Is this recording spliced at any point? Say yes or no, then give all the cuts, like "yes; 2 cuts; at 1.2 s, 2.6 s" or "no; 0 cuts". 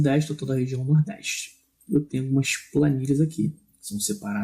yes; 1 cut; at 2.0 s